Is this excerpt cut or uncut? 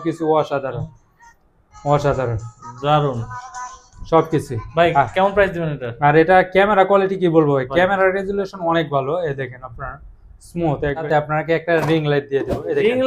cut